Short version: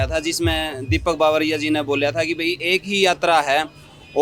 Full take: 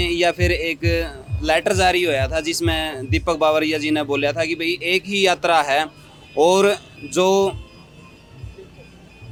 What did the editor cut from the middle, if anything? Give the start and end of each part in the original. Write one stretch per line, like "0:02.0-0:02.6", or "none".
none